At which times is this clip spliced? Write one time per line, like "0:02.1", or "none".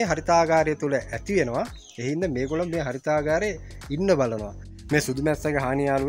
0:04.7